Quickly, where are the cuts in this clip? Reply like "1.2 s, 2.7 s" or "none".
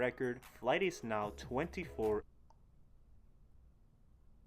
2.2 s